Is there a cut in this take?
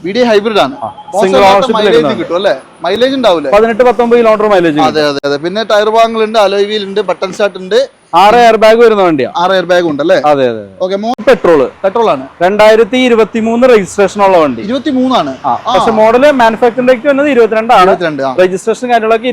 yes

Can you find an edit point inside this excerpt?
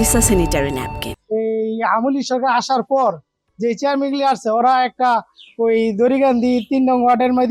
yes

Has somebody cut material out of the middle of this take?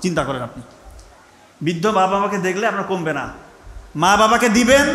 no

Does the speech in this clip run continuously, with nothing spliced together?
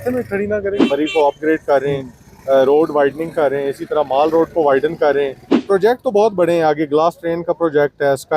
no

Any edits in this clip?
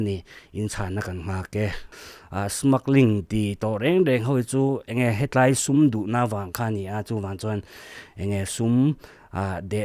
yes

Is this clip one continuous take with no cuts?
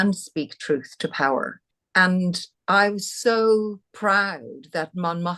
no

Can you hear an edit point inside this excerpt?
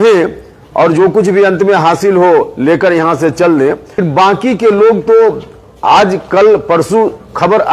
yes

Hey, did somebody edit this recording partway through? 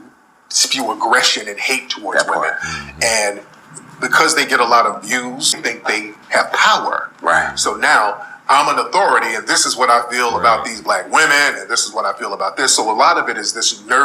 yes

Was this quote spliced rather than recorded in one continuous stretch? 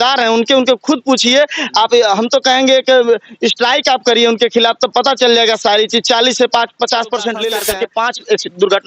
yes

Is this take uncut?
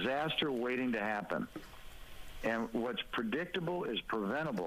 yes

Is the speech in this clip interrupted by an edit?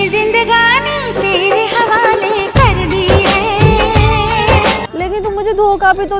yes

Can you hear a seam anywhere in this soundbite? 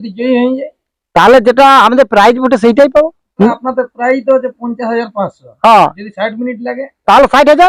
yes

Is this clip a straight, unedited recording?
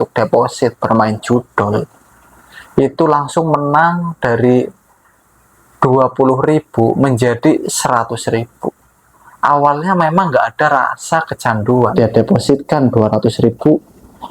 no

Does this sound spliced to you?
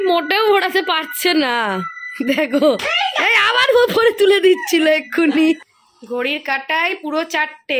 yes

